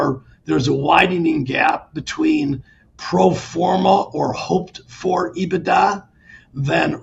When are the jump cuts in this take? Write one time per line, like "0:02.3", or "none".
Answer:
none